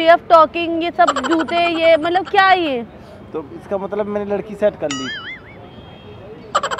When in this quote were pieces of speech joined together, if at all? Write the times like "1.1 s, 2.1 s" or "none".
none

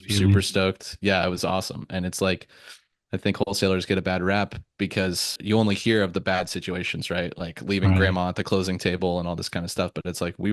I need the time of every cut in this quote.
none

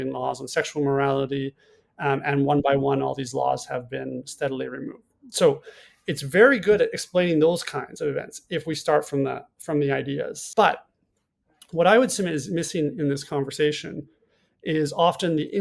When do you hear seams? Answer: 10.4 s

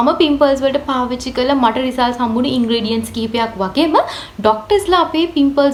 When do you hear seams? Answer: none

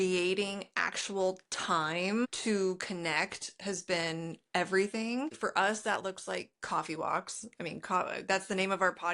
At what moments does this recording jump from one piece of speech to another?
2.2 s, 5.4 s

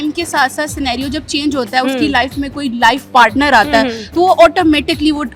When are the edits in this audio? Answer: none

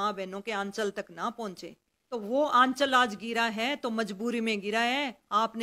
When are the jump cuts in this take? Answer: 2.1 s

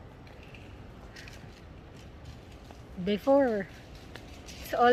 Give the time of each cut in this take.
none

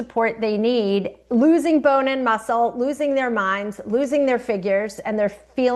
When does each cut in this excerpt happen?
none

